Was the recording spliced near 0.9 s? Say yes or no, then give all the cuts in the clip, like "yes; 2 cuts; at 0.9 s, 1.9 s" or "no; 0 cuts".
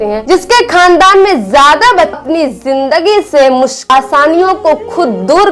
no; 2 cuts; at 2.2 s, 3.9 s